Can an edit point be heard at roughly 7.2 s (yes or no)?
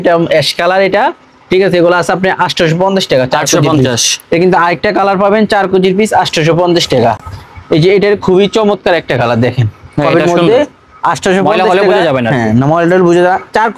no